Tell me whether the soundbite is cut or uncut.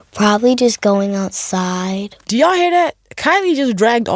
cut